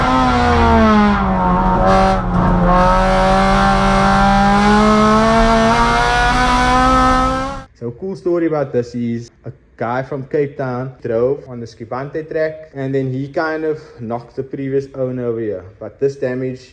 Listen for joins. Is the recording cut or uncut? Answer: uncut